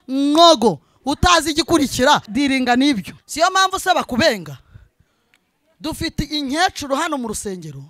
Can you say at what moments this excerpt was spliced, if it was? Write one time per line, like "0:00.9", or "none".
0:02.3
0:03.2